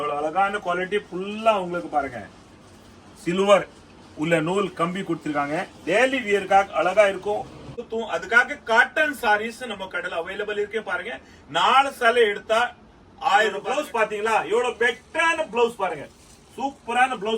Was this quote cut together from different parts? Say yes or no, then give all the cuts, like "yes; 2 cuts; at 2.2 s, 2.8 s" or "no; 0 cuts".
yes; 2 cuts; at 7.9 s, 13.6 s